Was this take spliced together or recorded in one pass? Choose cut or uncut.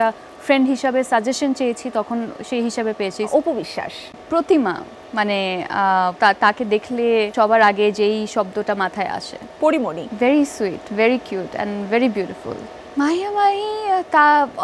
cut